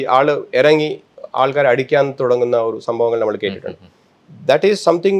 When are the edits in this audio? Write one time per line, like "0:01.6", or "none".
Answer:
none